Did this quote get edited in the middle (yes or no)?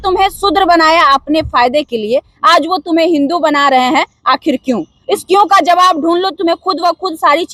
no